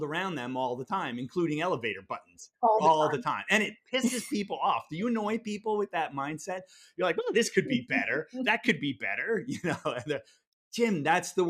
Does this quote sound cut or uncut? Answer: uncut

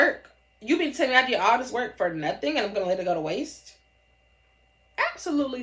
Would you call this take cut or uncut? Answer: uncut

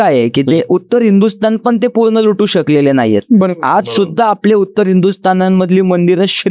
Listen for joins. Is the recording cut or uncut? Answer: uncut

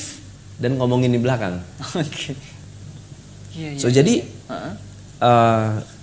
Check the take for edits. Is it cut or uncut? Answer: cut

